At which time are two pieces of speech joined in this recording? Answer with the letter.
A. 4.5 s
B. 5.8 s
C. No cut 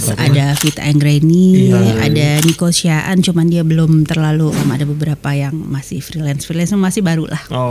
A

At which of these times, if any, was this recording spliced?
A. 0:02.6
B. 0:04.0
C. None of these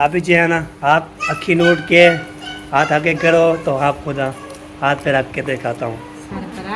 C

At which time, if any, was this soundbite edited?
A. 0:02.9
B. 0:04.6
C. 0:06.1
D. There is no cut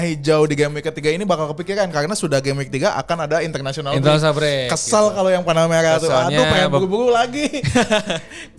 D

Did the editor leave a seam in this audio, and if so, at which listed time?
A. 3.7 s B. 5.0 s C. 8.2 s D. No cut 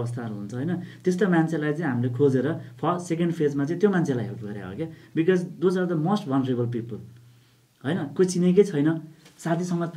D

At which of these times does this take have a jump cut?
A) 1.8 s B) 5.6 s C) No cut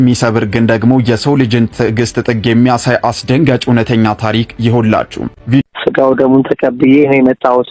B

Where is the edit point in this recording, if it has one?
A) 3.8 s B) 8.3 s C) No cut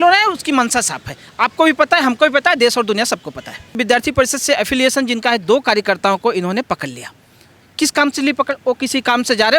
A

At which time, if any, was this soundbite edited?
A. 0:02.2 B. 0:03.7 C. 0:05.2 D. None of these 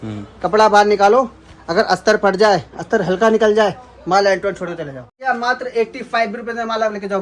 C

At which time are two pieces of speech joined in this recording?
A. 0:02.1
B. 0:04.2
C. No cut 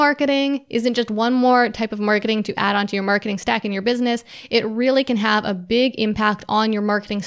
C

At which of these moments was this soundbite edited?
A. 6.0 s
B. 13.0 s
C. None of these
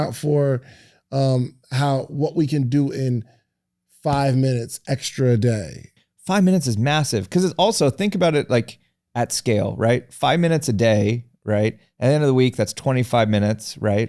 A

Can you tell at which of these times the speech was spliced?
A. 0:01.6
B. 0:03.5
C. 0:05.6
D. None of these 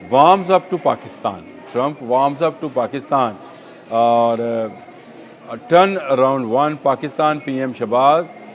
D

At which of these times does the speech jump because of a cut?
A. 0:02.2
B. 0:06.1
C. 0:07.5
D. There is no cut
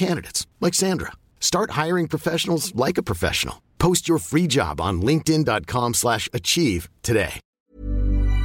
C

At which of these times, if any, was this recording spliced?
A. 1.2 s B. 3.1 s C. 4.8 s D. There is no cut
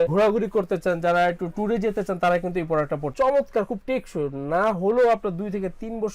B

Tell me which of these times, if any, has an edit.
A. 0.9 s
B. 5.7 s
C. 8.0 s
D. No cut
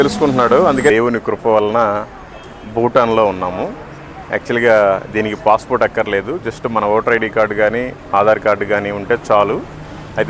A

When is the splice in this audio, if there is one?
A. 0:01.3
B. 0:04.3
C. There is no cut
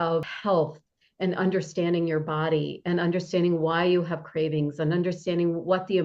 C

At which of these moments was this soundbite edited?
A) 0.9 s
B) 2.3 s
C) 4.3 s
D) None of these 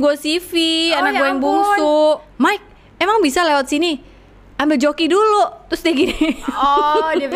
B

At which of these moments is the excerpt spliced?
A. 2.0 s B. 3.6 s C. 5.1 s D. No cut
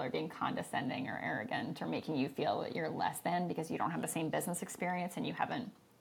D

